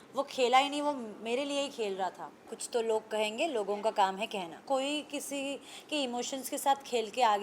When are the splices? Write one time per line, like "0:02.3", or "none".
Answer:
0:02.5
0:04.6

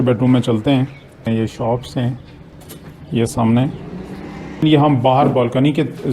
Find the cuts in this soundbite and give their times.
0:01.3
0:04.6

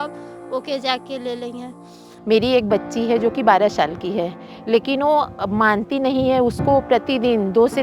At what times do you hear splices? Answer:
0:02.1

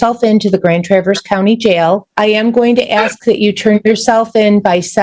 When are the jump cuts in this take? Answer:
0:02.1

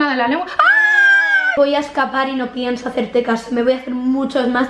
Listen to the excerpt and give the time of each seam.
0:01.5

